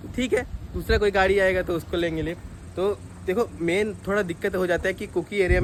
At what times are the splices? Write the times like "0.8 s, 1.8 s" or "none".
none